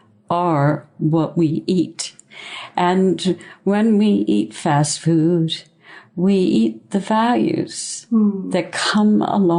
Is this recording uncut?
yes; 0 cuts

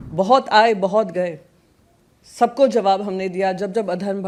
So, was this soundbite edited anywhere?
no; 0 cuts

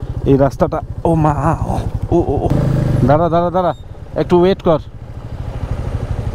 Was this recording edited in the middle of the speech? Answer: yes; 1 cut; at 2.5 s

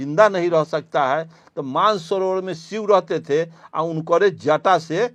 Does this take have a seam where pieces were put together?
no; 0 cuts

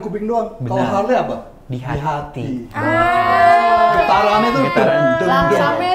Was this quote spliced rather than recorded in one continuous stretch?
no; 0 cuts

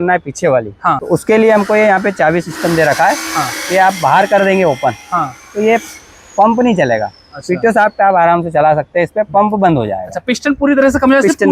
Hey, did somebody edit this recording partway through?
yes; 1 cut; at 1.0 s

